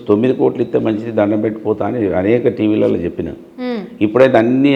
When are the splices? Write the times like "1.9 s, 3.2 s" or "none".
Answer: none